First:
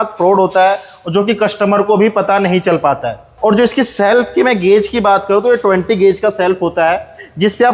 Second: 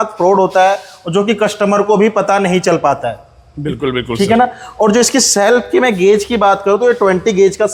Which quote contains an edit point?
first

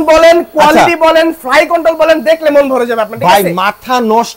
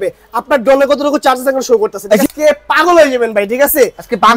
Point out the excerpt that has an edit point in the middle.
second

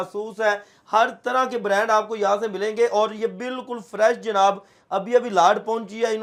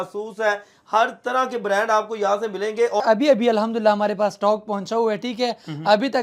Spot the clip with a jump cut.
second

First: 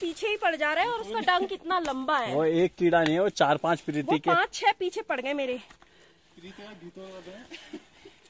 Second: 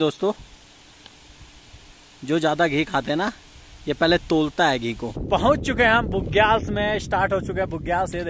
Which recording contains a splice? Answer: second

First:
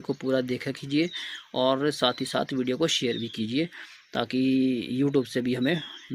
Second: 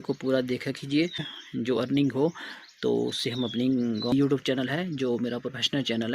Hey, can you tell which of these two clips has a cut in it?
second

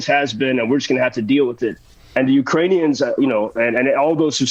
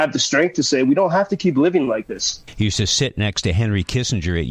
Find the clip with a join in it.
second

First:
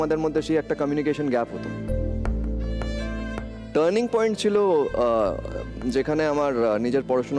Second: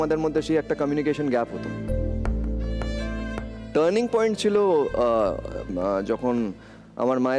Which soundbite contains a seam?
second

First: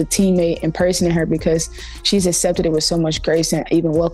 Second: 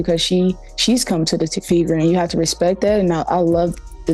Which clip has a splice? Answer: second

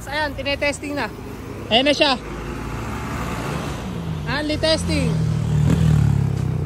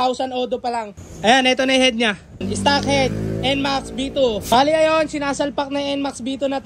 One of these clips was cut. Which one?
second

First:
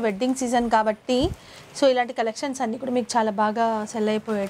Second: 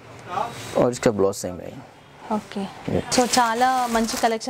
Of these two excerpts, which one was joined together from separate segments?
second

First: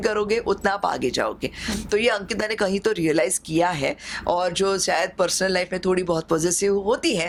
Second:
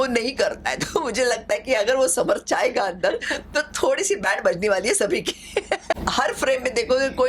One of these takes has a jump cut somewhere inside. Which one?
second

